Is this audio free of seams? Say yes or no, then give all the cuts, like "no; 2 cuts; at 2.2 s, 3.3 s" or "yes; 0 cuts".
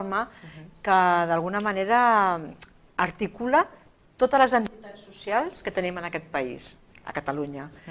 yes; 0 cuts